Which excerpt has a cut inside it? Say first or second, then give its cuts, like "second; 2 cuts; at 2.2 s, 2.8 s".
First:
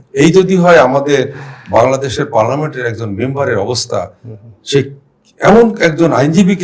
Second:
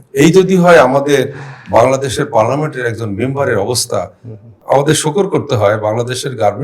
second; 1 cut; at 4.6 s